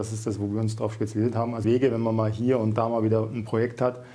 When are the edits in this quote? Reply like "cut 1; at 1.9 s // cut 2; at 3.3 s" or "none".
cut 1; at 1.6 s

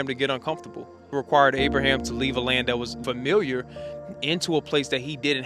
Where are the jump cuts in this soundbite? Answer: cut 1; at 1.1 s // cut 2; at 2.9 s

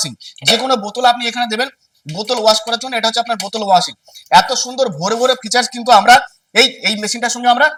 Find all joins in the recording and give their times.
none

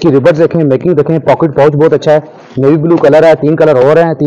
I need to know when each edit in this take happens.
none

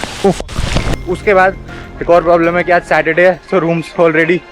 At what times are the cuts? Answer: cut 1; at 1.0 s

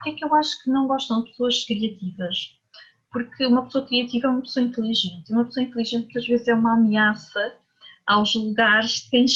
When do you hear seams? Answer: none

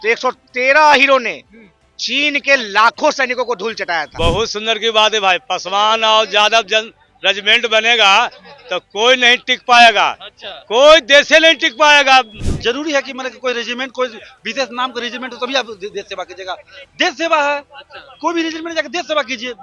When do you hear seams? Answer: cut 1; at 4.1 s // cut 2; at 12.3 s

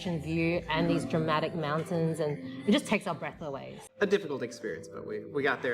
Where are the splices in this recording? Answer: cut 1; at 3.8 s

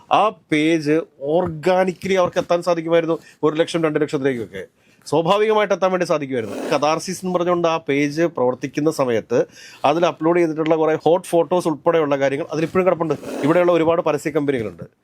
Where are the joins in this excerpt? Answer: cut 1; at 6.6 s // cut 2; at 13.3 s

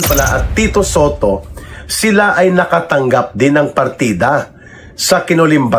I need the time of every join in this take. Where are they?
none

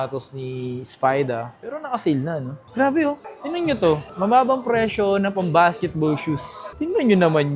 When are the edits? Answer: cut 1; at 2.6 s

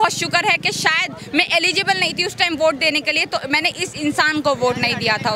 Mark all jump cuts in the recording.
none

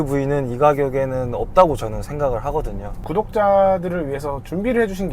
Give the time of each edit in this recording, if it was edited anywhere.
cut 1; at 3.0 s

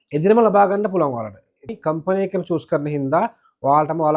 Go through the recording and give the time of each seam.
cut 1; at 1.7 s

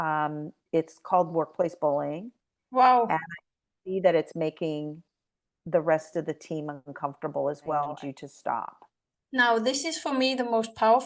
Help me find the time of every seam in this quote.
cut 1; at 7.9 s

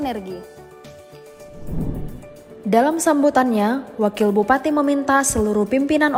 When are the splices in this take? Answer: none

